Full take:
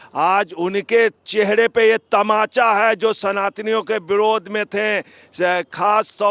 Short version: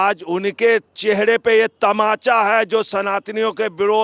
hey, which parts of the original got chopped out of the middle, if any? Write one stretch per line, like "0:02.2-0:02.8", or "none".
none